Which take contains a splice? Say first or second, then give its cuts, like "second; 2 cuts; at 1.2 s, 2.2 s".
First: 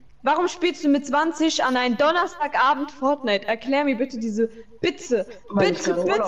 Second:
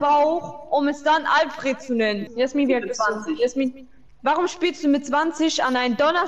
second; 1 cut; at 2.2 s